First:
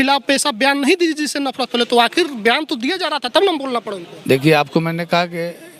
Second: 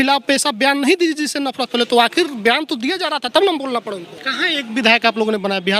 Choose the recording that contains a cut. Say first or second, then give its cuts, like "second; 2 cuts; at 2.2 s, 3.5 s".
second; 1 cut; at 4.1 s